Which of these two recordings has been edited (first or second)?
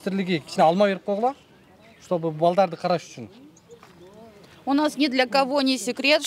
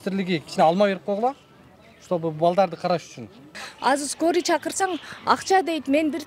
second